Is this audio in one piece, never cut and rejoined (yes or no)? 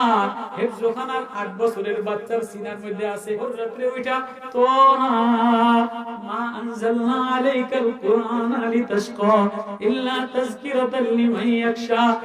no